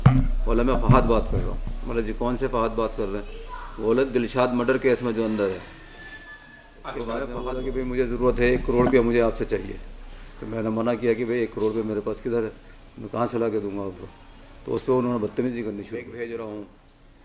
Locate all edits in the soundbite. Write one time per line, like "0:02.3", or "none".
0:07.5
0:16.1